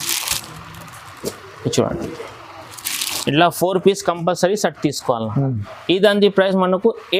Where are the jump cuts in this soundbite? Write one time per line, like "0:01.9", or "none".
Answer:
none